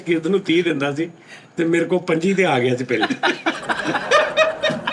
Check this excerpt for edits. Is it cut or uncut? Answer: uncut